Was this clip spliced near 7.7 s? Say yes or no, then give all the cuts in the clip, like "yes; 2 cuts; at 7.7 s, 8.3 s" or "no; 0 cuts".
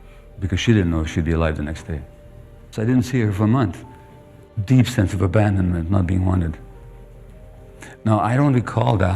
no; 1 cut; at 2.6 s